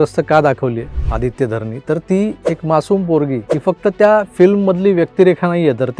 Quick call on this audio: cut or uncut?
cut